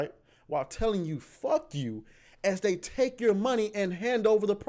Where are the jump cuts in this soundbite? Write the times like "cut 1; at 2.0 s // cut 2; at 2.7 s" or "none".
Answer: none